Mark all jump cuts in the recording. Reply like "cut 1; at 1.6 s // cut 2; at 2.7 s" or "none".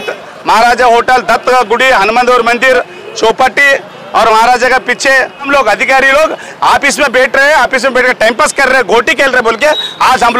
cut 1; at 5.5 s

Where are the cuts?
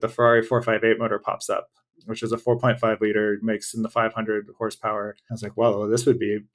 cut 1; at 3.4 s // cut 2; at 5.2 s

